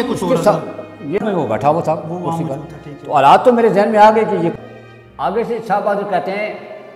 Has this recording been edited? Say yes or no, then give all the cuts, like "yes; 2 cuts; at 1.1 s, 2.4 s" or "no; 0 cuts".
yes; 2 cuts; at 1.2 s, 4.5 s